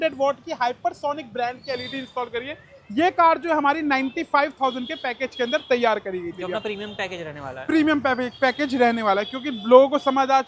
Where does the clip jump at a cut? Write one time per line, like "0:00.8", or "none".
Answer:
none